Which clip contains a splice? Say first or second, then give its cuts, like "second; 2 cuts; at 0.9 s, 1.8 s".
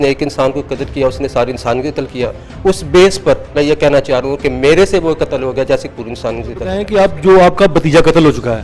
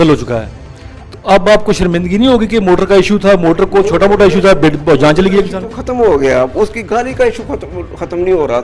first; 1 cut; at 6.8 s